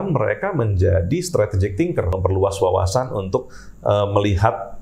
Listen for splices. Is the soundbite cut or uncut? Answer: cut